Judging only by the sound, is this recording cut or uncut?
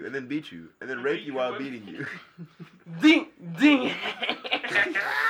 uncut